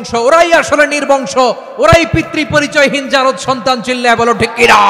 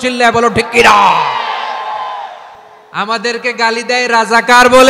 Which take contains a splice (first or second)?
second